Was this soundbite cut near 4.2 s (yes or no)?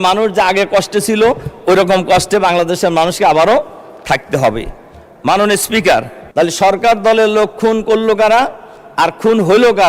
no